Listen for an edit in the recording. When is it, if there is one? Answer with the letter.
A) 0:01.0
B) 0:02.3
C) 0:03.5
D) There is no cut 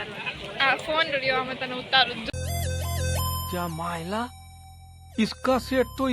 B